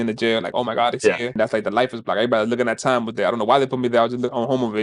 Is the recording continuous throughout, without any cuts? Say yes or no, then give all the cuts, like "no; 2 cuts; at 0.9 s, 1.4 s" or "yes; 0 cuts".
no; 1 cut; at 1.3 s